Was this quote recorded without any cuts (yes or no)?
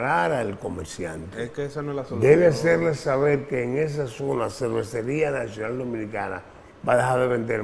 yes